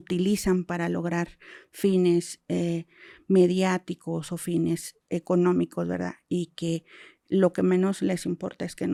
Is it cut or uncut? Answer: uncut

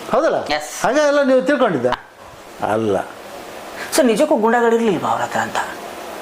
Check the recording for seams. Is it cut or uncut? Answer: cut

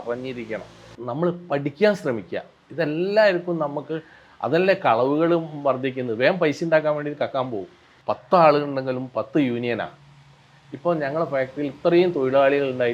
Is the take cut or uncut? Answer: cut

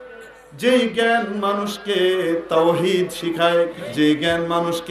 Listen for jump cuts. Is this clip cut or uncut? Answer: cut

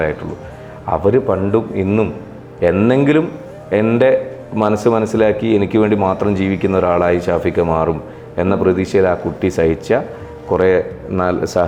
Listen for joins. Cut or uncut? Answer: uncut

